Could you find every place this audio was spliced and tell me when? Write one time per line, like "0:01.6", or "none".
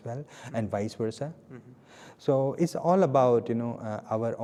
none